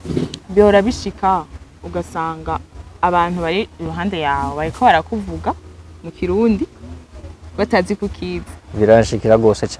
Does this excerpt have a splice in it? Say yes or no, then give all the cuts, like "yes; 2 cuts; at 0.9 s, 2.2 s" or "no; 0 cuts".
no; 0 cuts